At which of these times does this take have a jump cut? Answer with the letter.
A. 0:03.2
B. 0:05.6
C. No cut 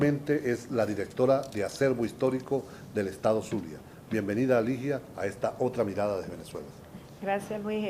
A